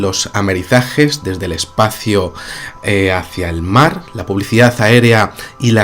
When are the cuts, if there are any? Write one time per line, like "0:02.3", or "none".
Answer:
none

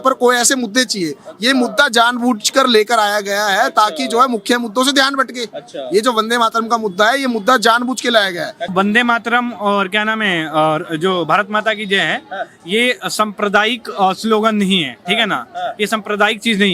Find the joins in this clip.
0:08.7

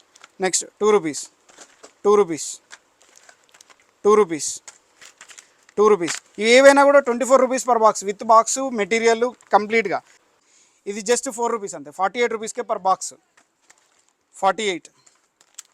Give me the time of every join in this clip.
0:10.2

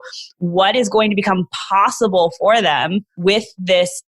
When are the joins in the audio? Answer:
0:03.1

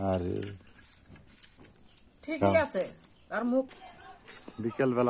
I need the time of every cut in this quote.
0:03.7

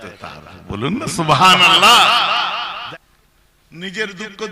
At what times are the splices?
0:02.8

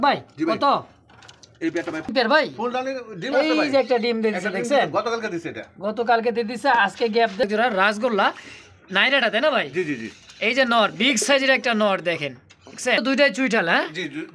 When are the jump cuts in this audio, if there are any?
0:02.1
0:07.4
0:13.0

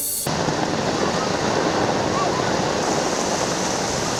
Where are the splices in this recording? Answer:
none

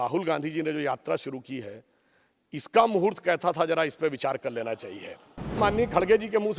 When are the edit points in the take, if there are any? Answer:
0:05.6

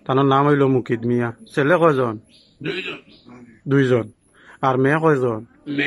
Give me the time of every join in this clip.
none

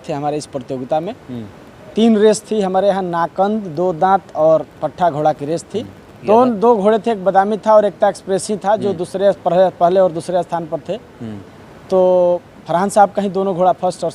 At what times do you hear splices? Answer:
0:06.3

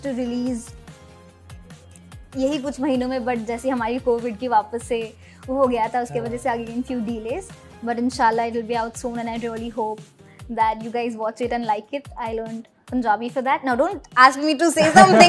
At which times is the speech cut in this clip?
none

